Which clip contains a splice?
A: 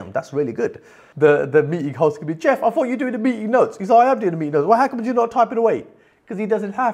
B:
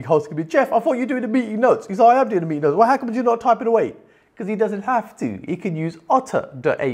A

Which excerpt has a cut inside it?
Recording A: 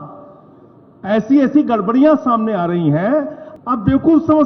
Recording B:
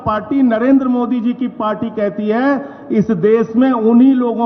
A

